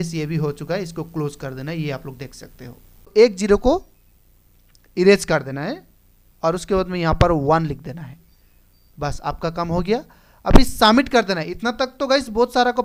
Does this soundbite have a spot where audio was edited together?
yes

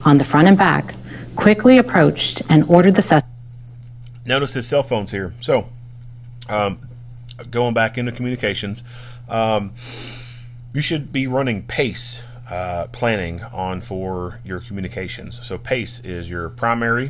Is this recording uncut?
yes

